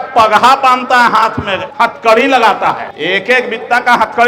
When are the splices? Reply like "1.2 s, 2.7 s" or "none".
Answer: 1.6 s, 2.9 s